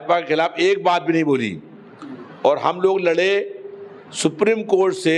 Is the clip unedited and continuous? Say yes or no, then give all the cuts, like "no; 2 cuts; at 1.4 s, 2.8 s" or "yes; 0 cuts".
yes; 0 cuts